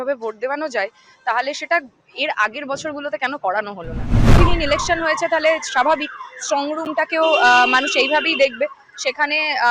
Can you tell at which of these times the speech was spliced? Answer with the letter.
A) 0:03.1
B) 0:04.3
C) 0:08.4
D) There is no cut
B